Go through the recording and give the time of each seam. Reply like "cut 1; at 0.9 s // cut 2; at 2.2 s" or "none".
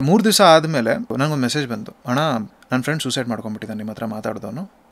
cut 1; at 1.1 s // cut 2; at 2.6 s